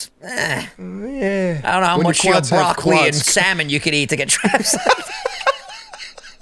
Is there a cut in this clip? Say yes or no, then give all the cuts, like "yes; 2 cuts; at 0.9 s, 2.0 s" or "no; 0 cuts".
no; 0 cuts